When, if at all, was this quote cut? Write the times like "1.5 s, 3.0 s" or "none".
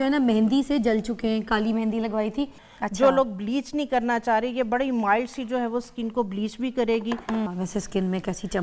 2.7 s, 7.5 s